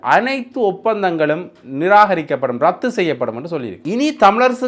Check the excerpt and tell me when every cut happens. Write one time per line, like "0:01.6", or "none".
0:03.7